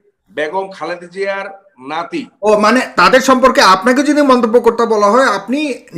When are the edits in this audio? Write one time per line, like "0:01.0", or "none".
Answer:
none